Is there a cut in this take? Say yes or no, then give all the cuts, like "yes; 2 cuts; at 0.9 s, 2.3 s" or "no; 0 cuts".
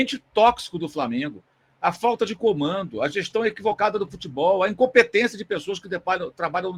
no; 0 cuts